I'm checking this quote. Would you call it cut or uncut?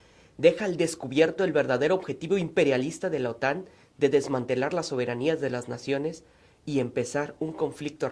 cut